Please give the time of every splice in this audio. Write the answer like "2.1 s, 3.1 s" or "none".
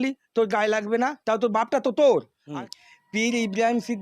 2.4 s